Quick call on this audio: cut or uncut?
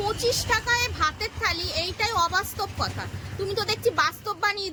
uncut